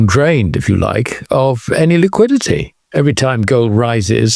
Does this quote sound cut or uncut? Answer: cut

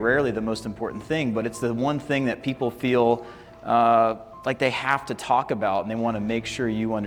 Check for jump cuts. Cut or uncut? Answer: uncut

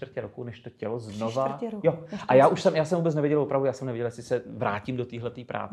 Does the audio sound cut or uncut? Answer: uncut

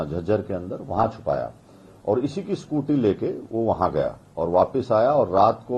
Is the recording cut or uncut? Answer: uncut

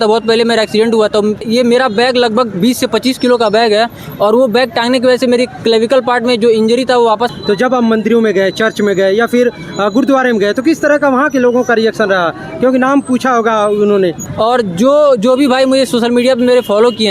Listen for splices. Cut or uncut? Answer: cut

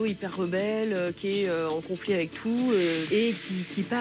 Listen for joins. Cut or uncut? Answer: cut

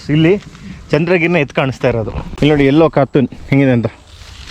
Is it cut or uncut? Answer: cut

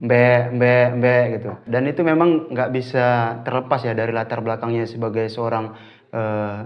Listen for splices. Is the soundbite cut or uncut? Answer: cut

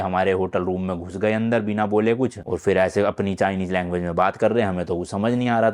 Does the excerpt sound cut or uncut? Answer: uncut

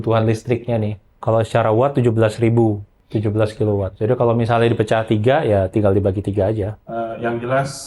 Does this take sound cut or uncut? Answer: cut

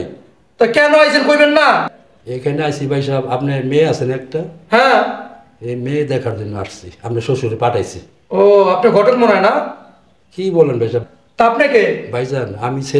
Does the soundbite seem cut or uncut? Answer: uncut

